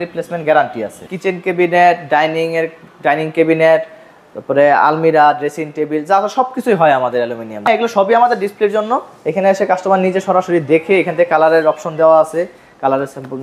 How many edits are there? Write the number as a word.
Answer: two